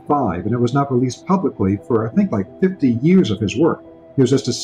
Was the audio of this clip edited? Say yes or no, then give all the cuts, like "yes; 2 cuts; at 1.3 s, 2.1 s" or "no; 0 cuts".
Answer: no; 0 cuts